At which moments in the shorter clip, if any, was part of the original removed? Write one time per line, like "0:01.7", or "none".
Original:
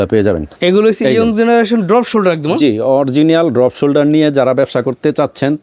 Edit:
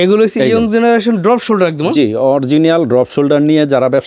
none